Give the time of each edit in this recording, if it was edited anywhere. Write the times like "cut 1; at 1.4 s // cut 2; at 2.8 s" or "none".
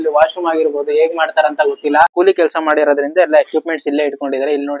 cut 1; at 2.1 s